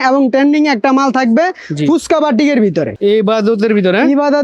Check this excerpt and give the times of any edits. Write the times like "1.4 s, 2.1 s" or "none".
2.9 s

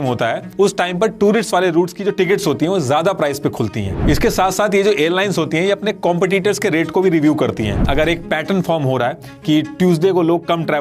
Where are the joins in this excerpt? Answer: 3.9 s, 7.8 s

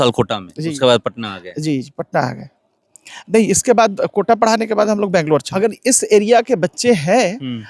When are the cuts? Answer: 5.5 s

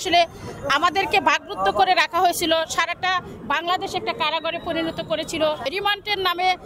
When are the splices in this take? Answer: 5.7 s

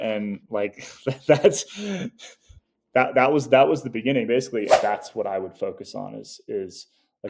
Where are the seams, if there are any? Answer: 4.8 s

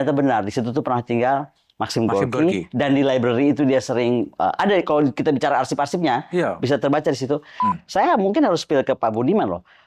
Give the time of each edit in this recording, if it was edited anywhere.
7.6 s

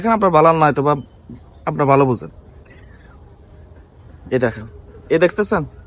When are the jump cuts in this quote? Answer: none

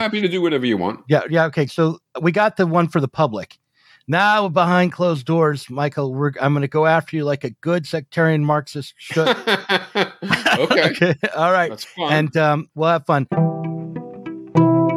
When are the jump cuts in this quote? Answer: 13.3 s

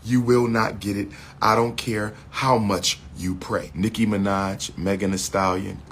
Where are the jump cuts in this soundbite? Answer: 3.7 s

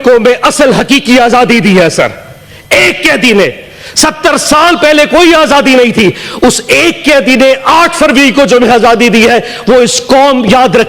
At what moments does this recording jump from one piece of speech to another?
none

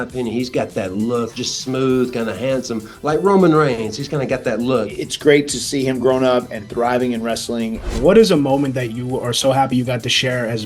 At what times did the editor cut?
1.3 s, 5.0 s, 7.9 s

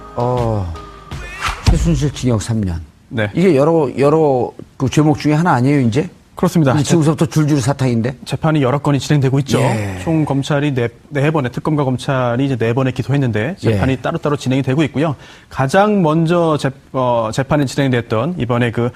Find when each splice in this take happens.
none

